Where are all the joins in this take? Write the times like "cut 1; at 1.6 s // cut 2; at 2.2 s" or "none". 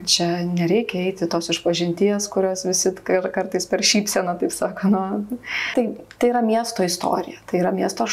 cut 1; at 5.7 s